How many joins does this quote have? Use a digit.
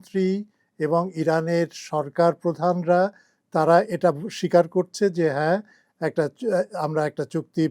0